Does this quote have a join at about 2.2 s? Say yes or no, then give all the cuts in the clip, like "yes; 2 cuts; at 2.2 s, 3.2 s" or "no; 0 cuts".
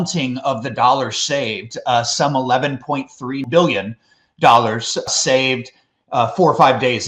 no; 2 cuts; at 3.4 s, 5.1 s